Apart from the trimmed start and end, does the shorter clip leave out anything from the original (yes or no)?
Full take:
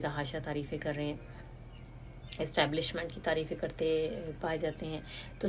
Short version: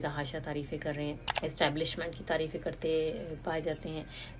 yes